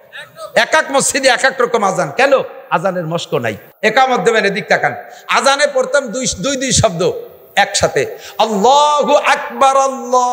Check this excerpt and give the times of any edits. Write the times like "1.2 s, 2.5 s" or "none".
3.6 s